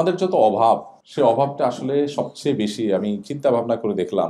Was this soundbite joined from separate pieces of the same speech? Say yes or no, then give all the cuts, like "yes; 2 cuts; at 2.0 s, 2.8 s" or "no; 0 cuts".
yes; 1 cut; at 1.0 s